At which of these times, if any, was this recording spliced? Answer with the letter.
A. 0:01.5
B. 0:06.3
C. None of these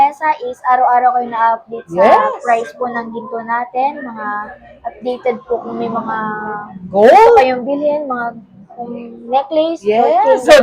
C